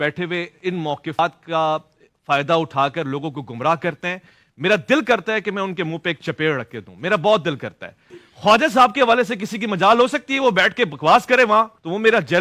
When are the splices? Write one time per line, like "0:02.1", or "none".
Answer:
0:01.2